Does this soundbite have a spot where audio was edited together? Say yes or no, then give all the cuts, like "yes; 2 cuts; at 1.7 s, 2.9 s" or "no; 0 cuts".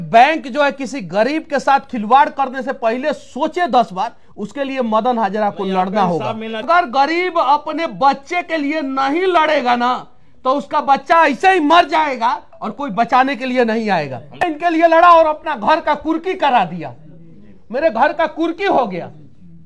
yes; 2 cuts; at 6.6 s, 14.4 s